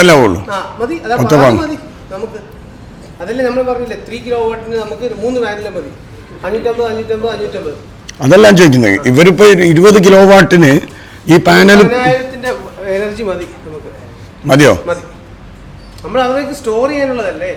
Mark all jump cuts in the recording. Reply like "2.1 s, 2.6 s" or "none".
none

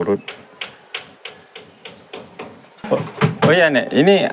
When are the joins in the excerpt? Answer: 2.7 s

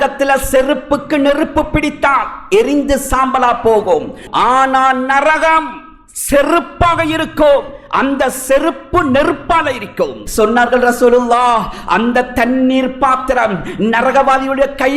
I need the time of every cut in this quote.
4.2 s, 10.2 s

